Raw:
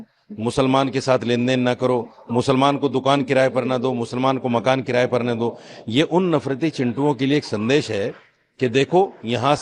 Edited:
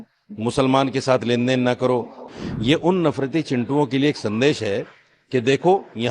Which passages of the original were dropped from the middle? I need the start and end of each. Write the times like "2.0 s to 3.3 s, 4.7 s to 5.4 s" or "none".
2.3 s to 5.5 s